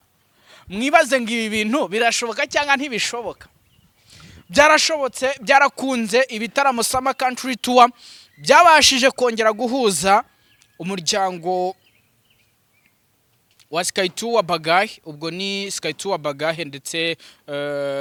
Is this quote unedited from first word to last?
yes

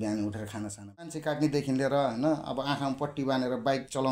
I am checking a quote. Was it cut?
yes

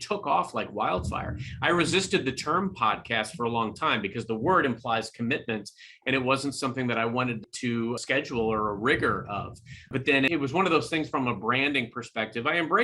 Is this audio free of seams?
no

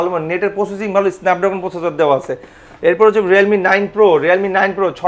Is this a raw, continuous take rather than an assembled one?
yes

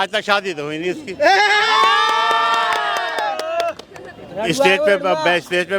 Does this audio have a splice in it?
no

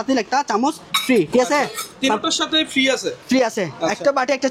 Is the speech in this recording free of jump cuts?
yes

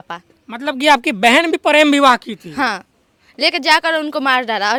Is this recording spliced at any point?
no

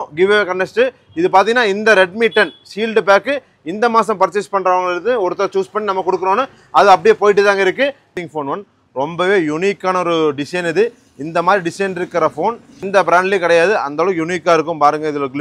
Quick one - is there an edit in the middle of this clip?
yes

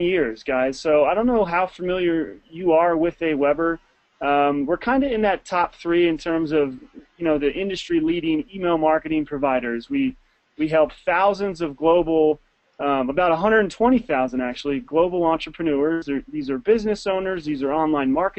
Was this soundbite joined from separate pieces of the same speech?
no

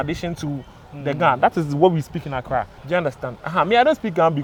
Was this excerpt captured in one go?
yes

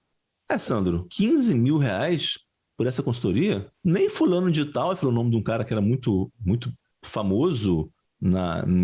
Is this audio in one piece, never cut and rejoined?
no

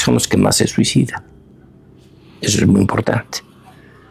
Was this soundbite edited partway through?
no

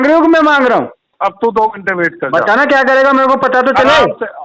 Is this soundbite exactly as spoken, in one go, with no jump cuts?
no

